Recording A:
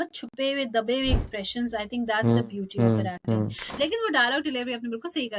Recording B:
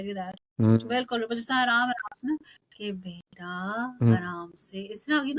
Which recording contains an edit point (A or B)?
A